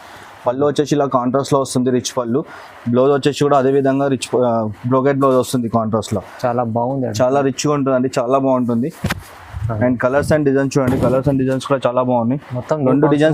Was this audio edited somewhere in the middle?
no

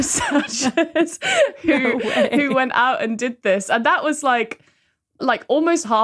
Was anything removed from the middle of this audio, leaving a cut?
no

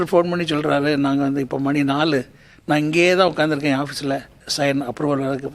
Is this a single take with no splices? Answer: no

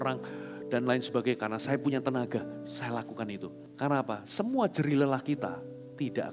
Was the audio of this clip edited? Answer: yes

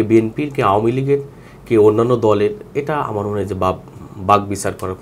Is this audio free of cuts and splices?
yes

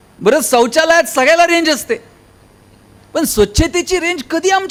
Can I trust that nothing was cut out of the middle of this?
yes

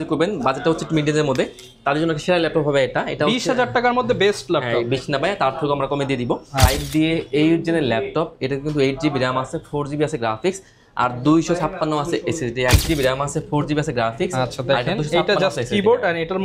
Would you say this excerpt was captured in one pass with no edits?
no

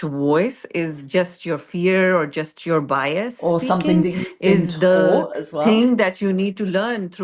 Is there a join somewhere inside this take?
no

